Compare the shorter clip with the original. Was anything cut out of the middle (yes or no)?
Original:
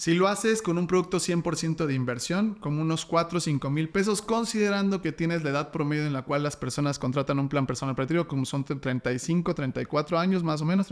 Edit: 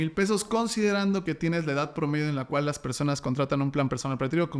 no